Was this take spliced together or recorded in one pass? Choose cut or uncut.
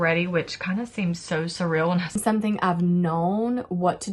cut